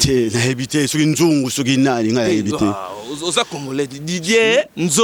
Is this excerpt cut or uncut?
uncut